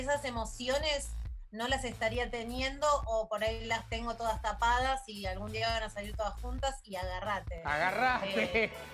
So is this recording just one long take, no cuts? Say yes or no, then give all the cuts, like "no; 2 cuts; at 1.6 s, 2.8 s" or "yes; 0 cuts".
yes; 0 cuts